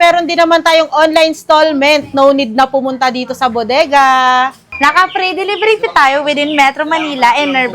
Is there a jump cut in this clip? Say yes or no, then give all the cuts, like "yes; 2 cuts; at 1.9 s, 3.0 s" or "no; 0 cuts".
yes; 1 cut; at 4.6 s